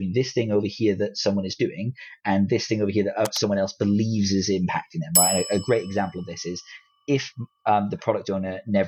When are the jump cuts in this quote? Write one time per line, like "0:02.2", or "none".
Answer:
none